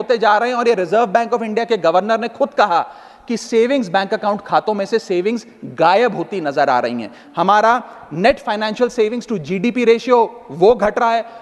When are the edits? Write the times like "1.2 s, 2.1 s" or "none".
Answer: none